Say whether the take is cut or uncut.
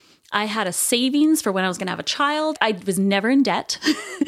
uncut